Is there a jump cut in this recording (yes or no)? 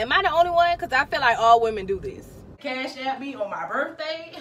yes